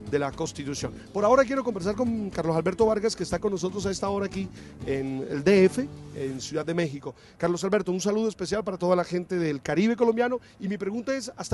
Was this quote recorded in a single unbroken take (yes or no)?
no